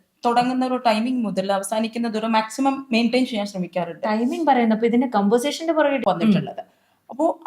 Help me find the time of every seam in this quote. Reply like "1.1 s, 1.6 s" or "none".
6.0 s